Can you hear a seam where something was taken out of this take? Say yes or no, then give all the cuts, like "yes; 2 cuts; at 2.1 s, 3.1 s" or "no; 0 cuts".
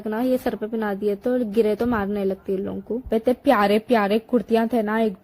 yes; 1 cut; at 3.1 s